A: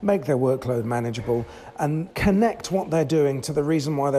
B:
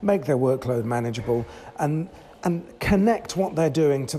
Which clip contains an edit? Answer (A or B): A